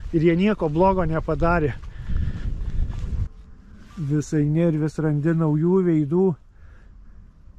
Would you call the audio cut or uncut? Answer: cut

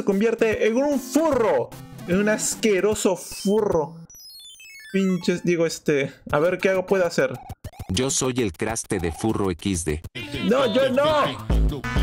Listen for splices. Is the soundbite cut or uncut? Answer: uncut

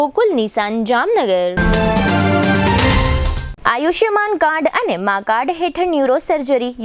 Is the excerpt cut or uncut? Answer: uncut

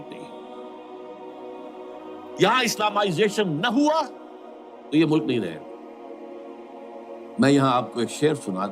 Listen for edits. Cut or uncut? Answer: cut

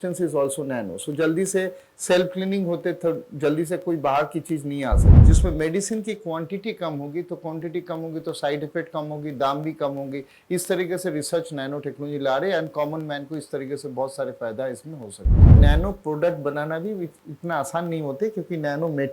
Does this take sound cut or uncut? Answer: cut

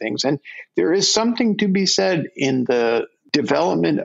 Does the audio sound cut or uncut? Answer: cut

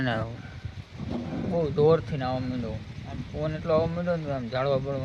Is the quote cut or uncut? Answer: uncut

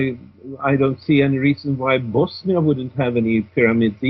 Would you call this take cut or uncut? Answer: cut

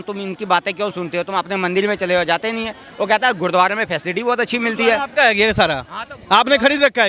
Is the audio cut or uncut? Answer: uncut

